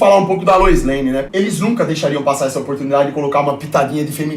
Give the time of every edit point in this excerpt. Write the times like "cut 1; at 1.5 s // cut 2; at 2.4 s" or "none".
cut 1; at 1.3 s